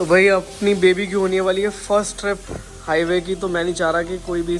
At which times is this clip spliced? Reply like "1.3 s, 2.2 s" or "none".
none